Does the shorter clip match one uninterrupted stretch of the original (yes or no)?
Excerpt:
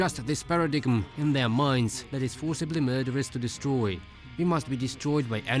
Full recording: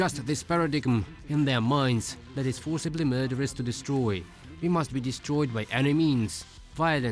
no